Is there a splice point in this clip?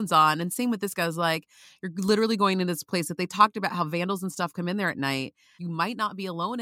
yes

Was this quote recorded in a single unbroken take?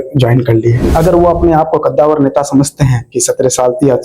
no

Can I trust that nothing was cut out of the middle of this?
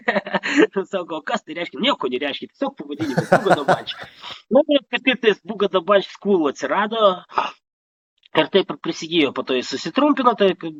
yes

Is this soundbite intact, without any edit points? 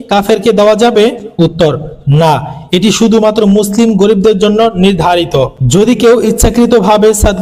yes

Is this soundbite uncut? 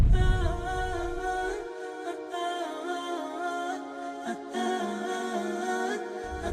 yes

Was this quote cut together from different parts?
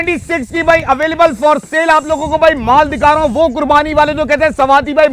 no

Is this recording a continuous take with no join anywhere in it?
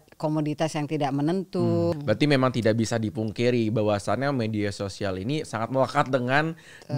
no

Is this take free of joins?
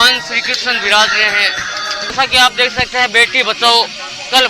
no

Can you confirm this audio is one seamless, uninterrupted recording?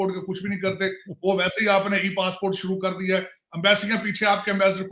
yes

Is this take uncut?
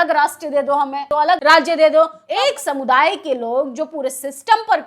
no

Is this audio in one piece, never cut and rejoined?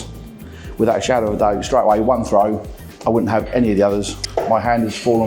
yes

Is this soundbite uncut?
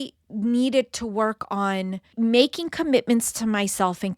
no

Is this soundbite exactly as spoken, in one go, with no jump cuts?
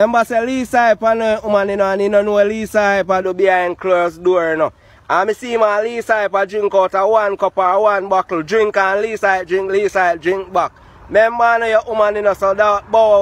yes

